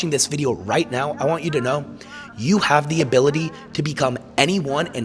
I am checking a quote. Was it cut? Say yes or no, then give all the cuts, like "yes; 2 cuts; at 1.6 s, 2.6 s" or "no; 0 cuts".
no; 0 cuts